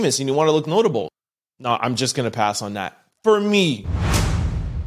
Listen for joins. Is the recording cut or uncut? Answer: cut